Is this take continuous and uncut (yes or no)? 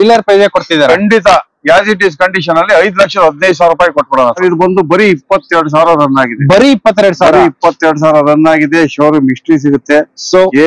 no